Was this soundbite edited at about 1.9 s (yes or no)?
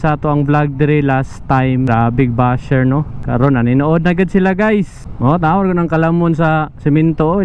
yes